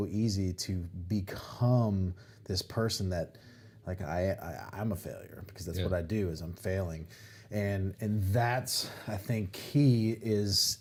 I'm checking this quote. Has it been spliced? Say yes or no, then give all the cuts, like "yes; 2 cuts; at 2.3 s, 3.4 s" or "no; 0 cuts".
no; 0 cuts